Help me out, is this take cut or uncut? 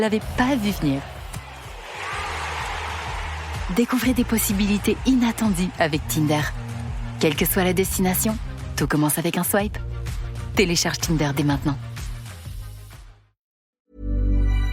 cut